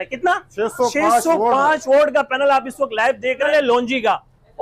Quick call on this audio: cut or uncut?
cut